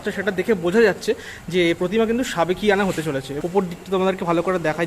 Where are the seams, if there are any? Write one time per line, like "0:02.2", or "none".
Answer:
0:03.3